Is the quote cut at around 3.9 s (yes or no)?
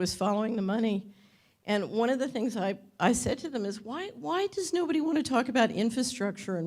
yes